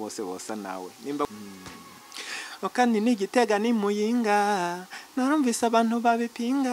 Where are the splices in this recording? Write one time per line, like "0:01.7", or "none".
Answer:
0:01.2

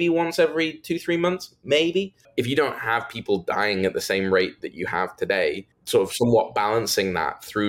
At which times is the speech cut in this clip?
0:02.2
0:05.7

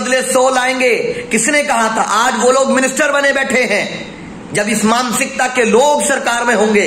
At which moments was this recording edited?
none

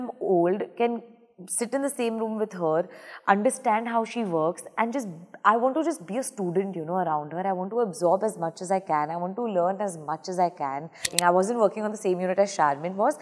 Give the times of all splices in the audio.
0:11.1

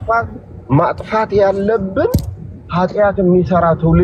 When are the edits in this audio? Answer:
none

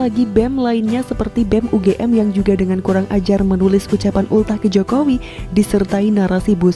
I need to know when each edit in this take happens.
none

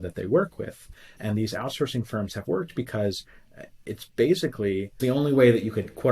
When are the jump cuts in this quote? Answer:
0:01.2
0:05.0

